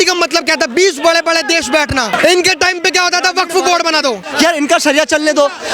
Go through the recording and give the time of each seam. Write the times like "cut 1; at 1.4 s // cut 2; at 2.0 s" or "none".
cut 1; at 2.1 s // cut 2; at 4.3 s